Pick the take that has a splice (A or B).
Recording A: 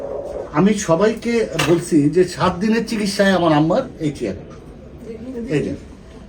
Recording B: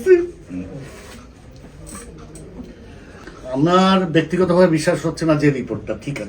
B